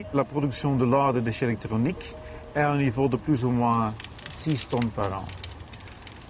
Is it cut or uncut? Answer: cut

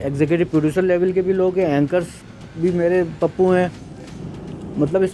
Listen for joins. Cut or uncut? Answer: uncut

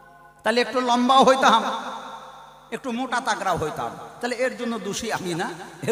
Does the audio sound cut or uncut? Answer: uncut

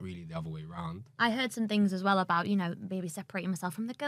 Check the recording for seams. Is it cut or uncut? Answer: cut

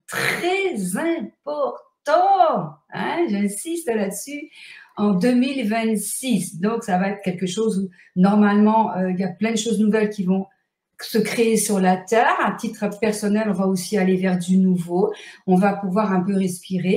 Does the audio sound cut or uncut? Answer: uncut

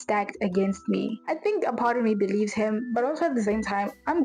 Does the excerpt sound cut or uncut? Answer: cut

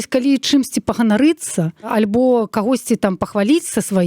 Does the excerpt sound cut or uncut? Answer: cut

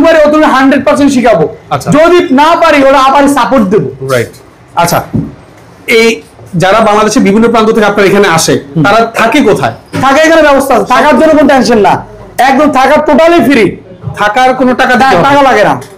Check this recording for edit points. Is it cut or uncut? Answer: uncut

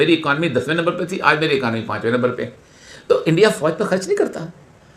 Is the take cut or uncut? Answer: uncut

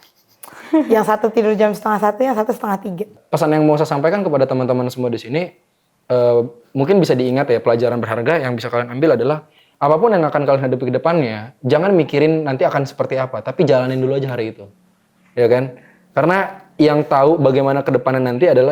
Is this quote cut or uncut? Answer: cut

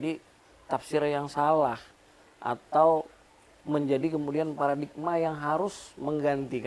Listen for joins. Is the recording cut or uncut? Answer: uncut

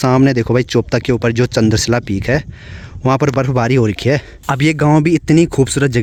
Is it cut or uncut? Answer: uncut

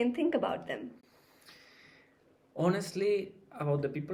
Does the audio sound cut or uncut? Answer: uncut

